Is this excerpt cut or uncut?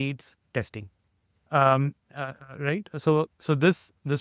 uncut